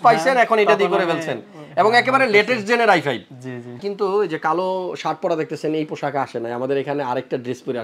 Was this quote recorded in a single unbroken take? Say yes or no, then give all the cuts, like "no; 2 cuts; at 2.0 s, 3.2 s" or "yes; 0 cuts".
no; 1 cut; at 3.8 s